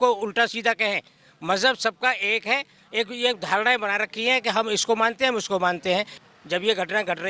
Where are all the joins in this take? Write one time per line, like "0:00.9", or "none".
0:06.2